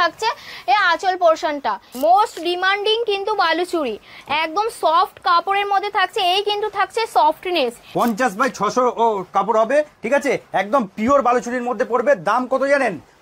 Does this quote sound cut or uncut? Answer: cut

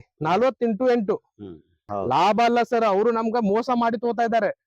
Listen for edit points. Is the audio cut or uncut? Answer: cut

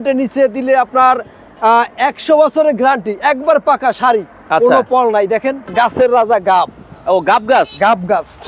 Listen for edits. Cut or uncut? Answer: cut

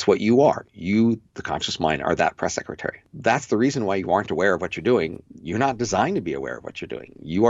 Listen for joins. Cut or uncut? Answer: cut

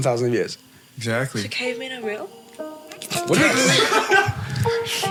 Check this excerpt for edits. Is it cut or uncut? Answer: uncut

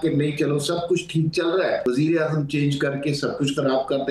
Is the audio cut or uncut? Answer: cut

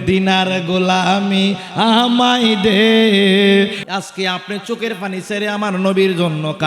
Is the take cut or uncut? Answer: cut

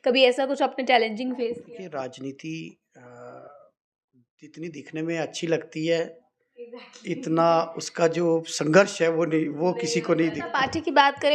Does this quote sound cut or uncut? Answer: cut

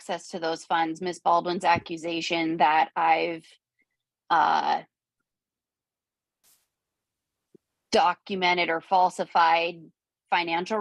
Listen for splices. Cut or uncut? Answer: uncut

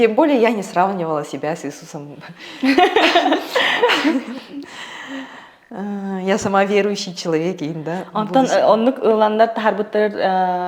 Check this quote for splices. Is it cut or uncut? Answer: uncut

